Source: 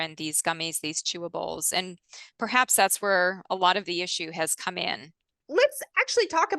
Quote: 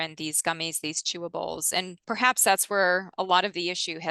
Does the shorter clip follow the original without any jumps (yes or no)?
no